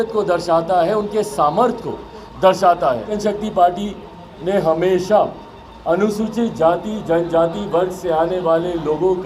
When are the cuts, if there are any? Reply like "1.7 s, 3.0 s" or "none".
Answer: 3.1 s